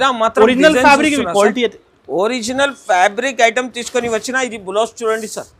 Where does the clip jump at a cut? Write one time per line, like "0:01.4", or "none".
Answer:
none